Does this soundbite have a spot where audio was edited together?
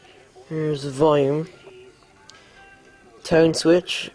yes; 1 cut; at 1.8 s

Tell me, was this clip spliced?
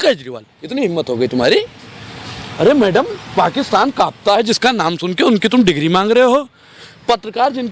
no; 0 cuts

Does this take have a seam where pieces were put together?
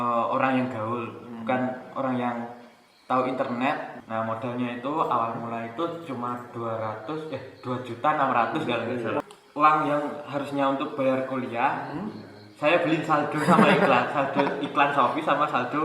yes; 2 cuts; at 4.0 s, 9.3 s

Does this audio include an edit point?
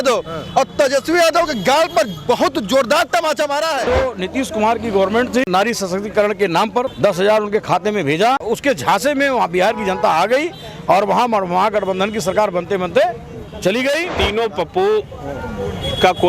yes; 5 cuts; at 3.9 s, 5.5 s, 6.9 s, 8.4 s, 14.2 s

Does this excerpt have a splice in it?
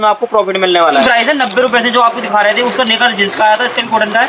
yes; 1 cut; at 0.9 s

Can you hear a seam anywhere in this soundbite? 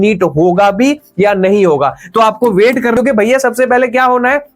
yes; 1 cut; at 2.9 s

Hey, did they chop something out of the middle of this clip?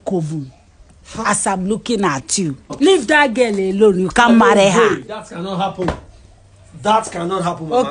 yes; 1 cut; at 2.7 s

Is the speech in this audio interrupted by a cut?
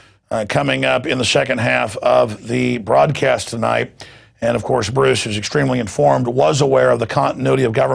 yes; 1 cut; at 6.1 s

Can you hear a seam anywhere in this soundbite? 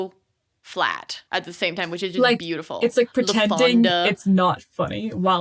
yes; 1 cut; at 1.1 s

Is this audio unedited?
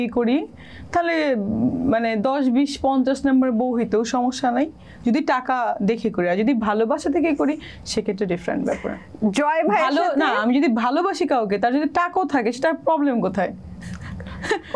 yes; 0 cuts

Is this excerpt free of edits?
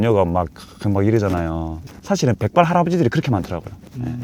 no; 1 cut; at 1.8 s

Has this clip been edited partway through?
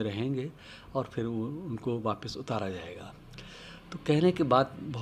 no; 0 cuts

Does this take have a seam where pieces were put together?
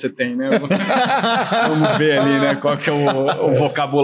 no; 0 cuts

